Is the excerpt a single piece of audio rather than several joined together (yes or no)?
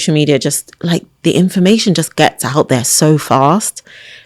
yes